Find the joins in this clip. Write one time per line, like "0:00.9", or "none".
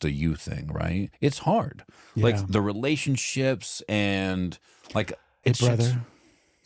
0:01.1
0:05.2